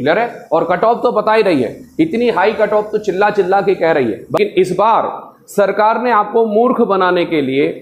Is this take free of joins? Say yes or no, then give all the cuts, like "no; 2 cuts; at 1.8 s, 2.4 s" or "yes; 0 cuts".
no; 1 cut; at 4.4 s